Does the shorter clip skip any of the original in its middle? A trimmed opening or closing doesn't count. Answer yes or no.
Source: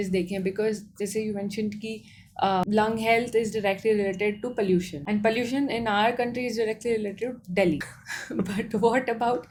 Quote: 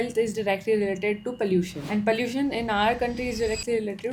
no